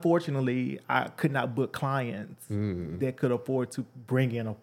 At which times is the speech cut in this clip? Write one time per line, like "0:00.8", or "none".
none